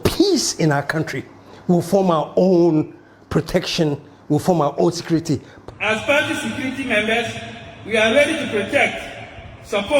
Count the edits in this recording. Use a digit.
1